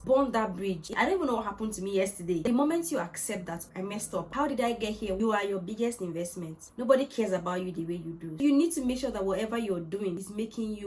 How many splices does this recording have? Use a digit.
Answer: 4